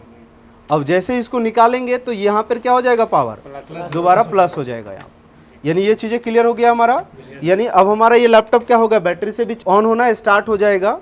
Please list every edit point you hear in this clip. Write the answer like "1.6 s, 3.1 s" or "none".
9.5 s